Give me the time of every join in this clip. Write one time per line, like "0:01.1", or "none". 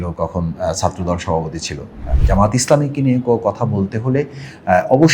0:02.1

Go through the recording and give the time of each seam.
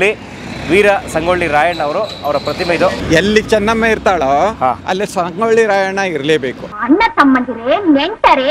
0:03.0
0:06.7

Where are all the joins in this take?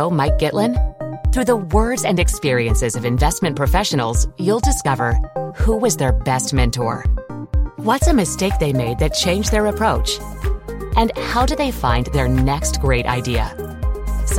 none

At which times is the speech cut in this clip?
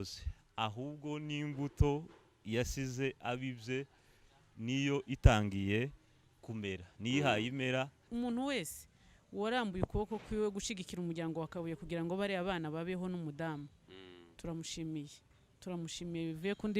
0:08.0

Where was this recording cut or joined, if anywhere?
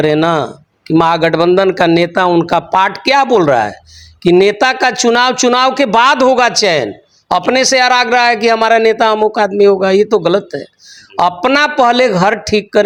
none

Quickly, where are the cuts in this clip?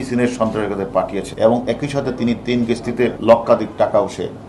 0:01.2
0:03.2

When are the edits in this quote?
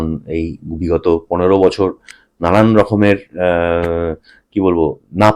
none

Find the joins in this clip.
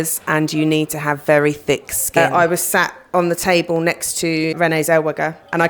0:02.2
0:04.5

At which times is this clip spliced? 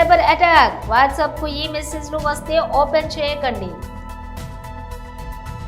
0:04.3

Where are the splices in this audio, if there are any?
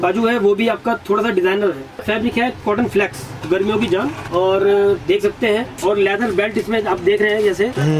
0:02.0
0:03.4
0:04.2
0:05.8

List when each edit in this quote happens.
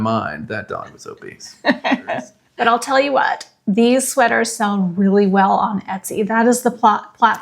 0:02.4

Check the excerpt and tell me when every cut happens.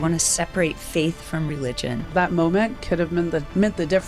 0:02.1

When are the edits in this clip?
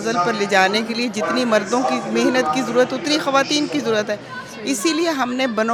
none

